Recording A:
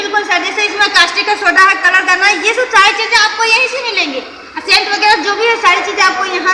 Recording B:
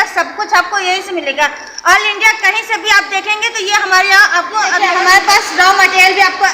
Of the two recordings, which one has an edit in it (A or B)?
B